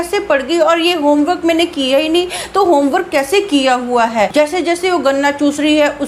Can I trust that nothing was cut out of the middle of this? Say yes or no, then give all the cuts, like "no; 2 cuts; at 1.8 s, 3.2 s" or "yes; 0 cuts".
no; 1 cut; at 4.3 s